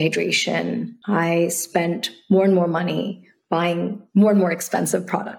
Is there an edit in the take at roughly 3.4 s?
no; 1 cut; at 0.9 s

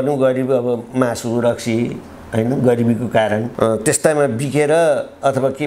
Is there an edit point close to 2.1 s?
no; 1 cut; at 3.5 s

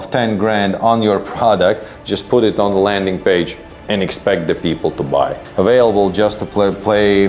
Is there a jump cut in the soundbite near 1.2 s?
no; 1 cut; at 5.4 s

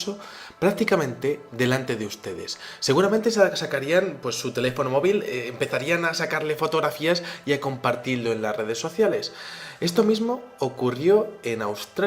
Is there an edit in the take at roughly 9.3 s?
yes; 1 cut; at 9.3 s

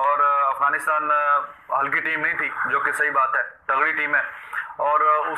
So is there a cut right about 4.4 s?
no; 0 cuts

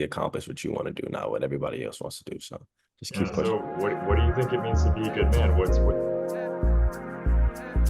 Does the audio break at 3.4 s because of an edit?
yes; 1 cut; at 3.4 s

